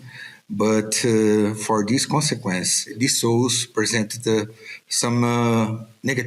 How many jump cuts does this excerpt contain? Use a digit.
1